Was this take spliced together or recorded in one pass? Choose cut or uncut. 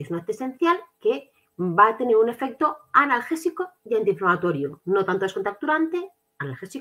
uncut